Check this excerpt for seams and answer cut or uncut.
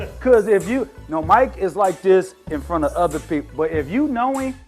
uncut